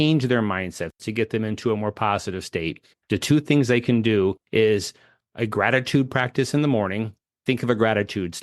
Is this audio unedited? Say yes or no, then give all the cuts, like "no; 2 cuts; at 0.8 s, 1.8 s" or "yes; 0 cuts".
no; 2 cuts; at 0.9 s, 7.1 s